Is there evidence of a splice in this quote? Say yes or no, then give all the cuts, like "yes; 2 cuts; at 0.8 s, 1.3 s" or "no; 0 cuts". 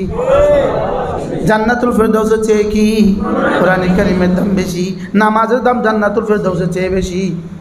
yes; 1 cut; at 1.3 s